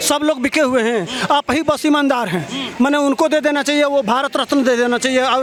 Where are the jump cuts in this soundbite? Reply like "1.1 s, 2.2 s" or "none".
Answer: none